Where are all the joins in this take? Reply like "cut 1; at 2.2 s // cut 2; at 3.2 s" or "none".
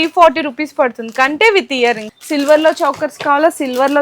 cut 1; at 2.1 s